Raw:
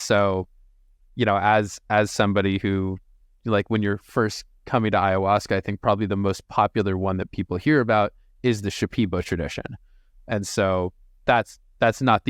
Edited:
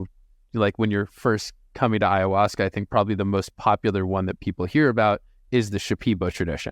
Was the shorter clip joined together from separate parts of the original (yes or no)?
no